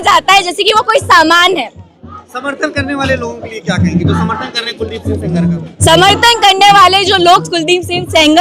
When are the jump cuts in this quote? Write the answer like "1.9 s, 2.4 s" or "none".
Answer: none